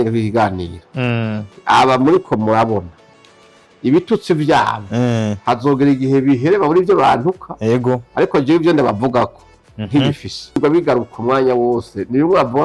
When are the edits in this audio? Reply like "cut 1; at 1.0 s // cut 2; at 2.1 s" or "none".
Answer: cut 1; at 10.6 s